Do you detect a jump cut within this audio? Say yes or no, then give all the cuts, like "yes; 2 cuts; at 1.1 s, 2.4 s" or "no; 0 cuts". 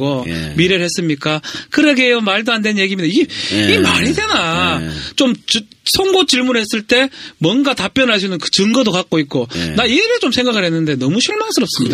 yes; 1 cut; at 1.4 s